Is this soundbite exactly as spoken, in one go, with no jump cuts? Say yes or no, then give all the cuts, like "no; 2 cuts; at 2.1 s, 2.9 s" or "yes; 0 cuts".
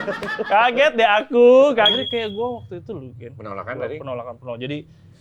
no; 1 cut; at 1.9 s